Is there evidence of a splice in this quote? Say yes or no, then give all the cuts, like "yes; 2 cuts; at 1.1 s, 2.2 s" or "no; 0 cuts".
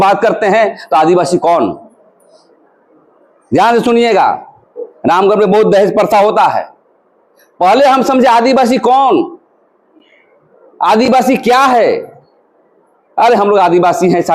no; 0 cuts